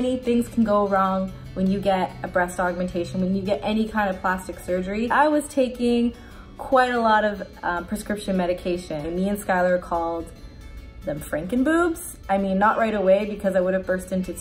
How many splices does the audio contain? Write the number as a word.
two